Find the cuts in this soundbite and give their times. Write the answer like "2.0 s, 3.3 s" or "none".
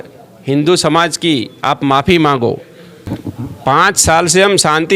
3.1 s